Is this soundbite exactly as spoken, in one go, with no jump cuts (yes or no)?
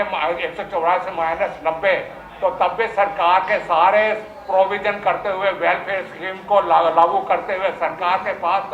yes